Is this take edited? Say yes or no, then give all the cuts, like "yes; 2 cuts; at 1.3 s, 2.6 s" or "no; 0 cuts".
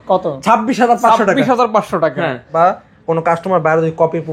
yes; 1 cut; at 2.5 s